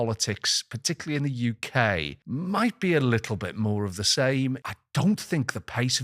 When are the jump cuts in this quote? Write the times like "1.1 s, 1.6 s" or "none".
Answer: 2.2 s, 4.7 s